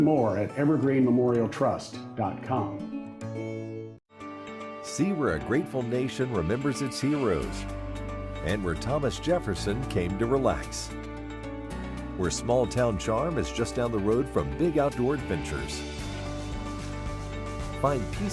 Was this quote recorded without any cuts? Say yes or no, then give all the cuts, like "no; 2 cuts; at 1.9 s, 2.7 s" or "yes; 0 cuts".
no; 1 cut; at 4.1 s